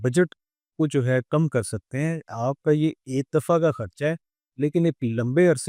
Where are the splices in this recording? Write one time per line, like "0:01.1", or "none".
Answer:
0:02.3